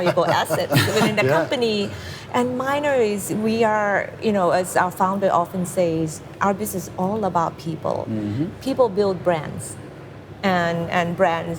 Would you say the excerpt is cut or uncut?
uncut